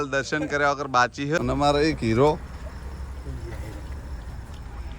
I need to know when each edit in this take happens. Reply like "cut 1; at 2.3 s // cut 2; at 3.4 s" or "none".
cut 1; at 1.4 s